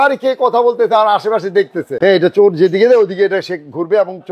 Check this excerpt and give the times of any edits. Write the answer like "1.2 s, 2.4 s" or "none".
1.9 s